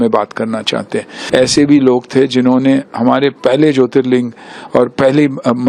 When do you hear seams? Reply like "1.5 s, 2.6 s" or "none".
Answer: 1.1 s